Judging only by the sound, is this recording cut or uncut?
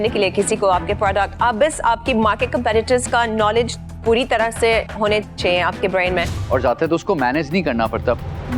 cut